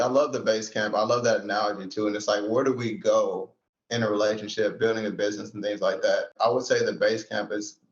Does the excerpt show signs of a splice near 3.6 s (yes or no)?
no